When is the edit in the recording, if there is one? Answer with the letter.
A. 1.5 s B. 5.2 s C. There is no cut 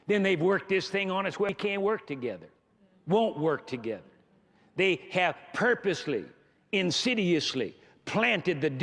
A